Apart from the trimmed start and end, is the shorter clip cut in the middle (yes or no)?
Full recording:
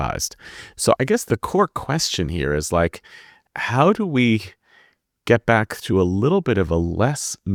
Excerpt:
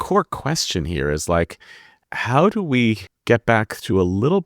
yes